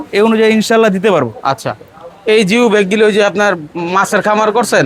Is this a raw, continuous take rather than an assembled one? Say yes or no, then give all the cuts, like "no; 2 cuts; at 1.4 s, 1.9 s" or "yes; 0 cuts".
yes; 0 cuts